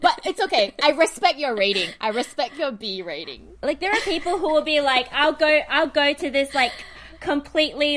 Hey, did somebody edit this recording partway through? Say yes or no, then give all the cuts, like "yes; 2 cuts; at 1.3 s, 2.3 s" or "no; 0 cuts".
no; 0 cuts